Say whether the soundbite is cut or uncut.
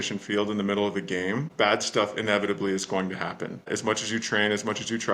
cut